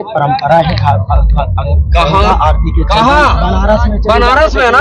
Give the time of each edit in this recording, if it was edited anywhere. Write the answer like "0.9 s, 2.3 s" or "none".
none